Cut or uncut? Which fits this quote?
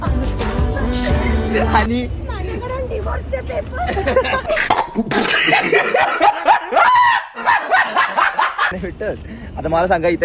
uncut